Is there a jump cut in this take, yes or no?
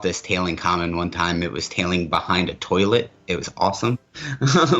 no